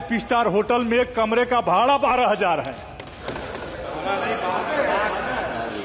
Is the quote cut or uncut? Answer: uncut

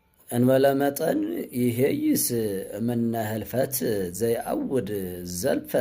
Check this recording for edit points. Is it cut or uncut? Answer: uncut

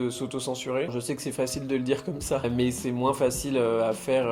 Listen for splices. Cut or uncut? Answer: uncut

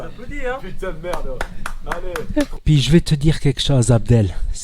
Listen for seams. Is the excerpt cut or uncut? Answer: cut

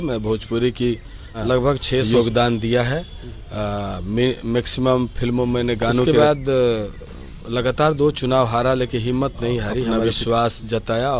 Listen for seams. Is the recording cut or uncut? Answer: cut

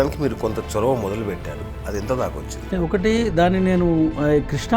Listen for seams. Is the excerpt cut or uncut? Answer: cut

